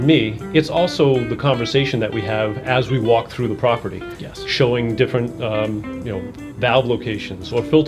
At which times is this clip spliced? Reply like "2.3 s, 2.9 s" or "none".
none